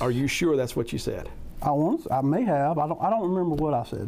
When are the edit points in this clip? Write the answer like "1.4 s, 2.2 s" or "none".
none